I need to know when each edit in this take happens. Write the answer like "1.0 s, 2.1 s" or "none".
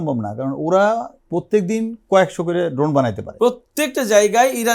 3.2 s